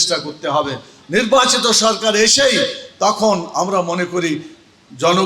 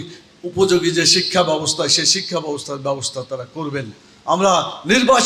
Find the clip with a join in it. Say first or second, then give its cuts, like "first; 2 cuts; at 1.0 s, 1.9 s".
first; 1 cut; at 0.9 s